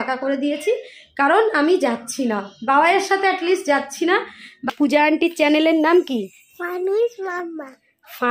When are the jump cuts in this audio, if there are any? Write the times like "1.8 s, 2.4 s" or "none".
4.7 s